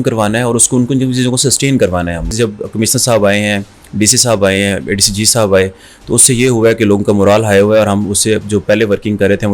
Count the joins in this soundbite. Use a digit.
1